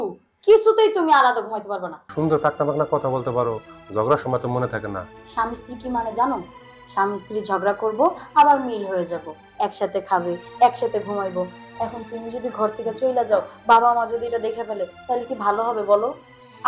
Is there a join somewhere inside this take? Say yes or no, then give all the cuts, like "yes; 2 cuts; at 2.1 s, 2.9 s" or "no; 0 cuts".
yes; 1 cut; at 2.1 s